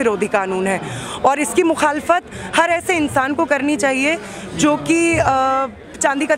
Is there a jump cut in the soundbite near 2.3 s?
no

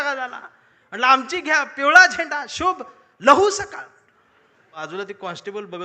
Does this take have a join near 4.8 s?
yes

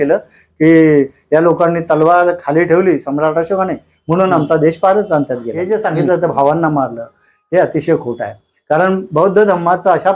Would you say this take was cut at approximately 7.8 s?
no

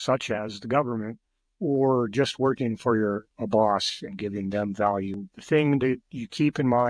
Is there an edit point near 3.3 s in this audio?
no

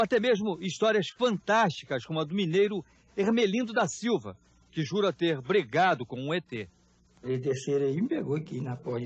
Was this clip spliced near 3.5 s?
no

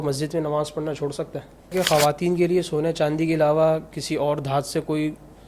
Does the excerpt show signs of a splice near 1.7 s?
yes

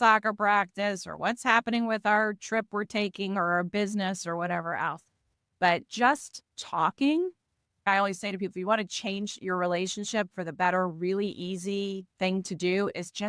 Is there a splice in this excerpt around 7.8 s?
yes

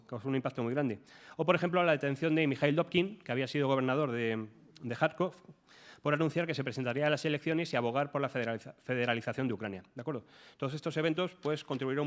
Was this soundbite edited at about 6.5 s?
no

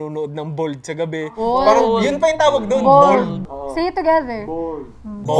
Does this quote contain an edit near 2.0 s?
no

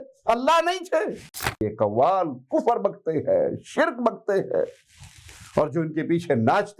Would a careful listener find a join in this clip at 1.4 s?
yes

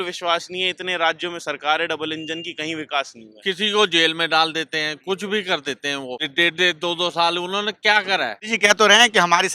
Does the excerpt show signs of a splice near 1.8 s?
no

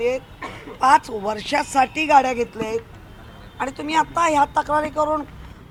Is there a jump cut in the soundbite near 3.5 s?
no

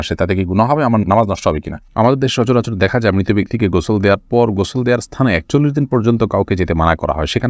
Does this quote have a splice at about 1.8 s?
yes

